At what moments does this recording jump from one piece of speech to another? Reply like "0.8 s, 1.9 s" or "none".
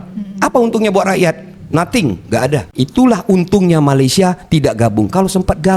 2.7 s